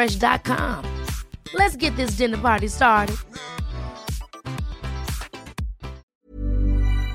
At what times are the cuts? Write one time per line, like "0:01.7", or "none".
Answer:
0:06.0